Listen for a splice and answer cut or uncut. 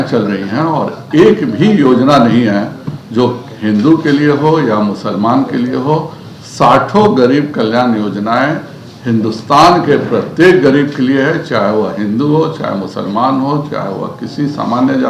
uncut